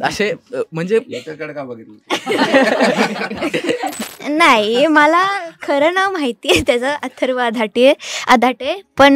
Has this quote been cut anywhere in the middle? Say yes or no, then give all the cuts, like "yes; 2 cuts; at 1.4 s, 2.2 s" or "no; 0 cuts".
yes; 1 cut; at 4.1 s